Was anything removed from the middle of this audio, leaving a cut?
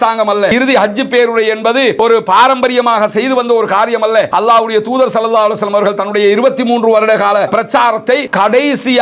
no; 0 cuts

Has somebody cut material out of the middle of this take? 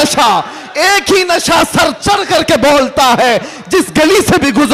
no; 0 cuts

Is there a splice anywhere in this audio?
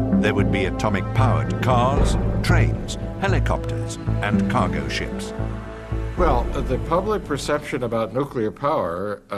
yes; 1 cut; at 5.0 s

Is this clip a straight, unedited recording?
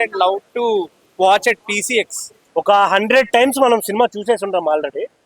no; 1 cut; at 2.4 s

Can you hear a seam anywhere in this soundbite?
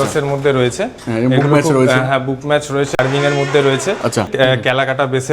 yes; 2 cuts; at 3.0 s, 4.3 s

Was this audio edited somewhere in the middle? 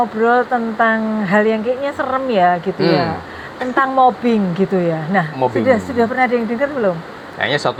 no; 0 cuts

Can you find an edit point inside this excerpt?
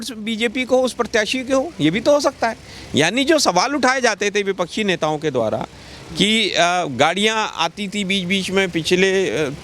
no; 0 cuts

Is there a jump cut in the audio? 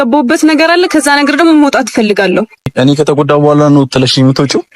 yes; 1 cut; at 2.7 s

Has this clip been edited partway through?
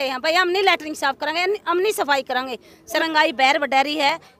yes; 1 cut; at 3.0 s

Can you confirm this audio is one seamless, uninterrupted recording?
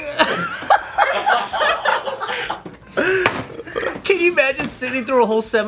yes; 0 cuts

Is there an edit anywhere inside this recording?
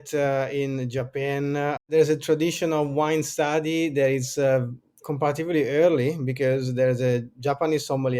no; 0 cuts

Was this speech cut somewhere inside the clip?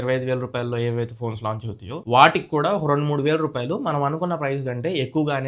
no; 0 cuts

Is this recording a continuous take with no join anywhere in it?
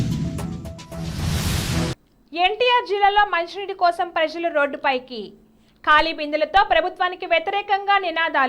no; 1 cut; at 2.0 s

